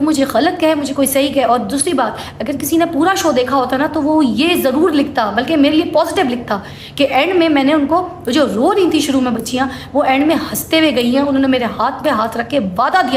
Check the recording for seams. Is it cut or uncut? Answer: uncut